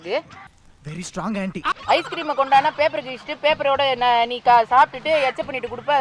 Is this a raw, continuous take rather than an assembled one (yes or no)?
no